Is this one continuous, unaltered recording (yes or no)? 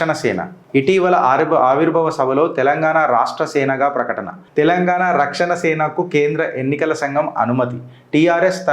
yes